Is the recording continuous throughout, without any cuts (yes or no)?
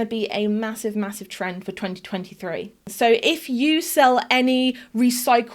no